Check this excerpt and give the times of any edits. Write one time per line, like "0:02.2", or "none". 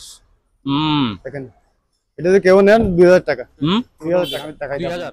none